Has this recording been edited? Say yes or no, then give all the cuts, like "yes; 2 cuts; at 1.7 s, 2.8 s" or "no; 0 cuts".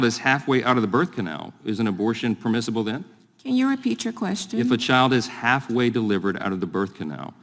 yes; 1 cut; at 1.1 s